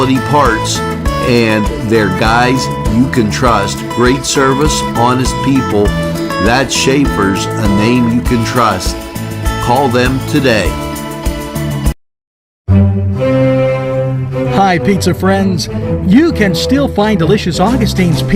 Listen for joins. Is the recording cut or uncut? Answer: uncut